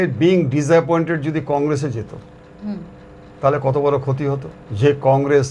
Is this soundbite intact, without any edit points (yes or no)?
yes